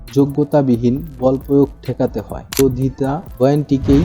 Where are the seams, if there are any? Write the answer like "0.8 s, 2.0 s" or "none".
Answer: 2.6 s